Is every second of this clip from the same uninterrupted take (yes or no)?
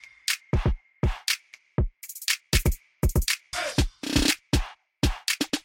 no